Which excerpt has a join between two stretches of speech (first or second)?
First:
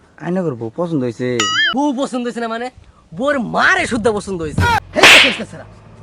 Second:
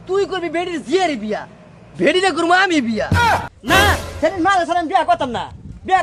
first